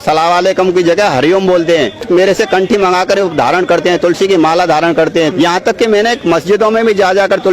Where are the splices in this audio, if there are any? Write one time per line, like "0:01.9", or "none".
0:02.0
0:05.3